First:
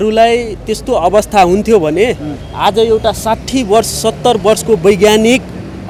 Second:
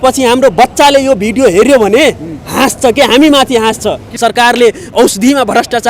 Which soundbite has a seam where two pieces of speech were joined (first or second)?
second